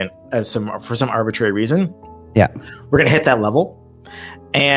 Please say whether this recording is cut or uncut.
uncut